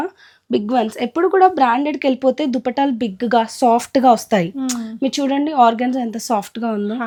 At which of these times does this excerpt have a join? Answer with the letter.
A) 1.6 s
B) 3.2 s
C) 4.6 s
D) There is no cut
D